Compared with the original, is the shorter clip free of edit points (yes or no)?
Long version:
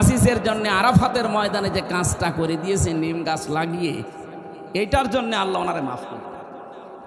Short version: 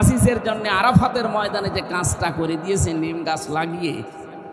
yes